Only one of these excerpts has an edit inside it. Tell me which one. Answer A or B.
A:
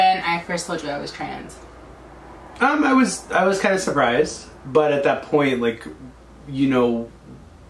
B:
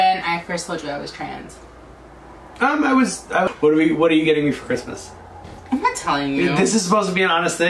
B